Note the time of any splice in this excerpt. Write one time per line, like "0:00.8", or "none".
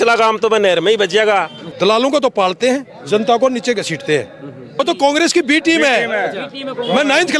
0:01.6
0:04.8